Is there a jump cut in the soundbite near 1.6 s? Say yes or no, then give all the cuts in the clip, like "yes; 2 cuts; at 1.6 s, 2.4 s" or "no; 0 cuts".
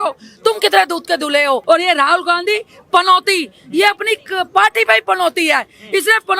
yes; 1 cut; at 1.6 s